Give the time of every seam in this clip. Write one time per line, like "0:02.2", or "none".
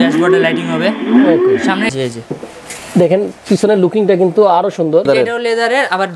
0:01.9
0:05.1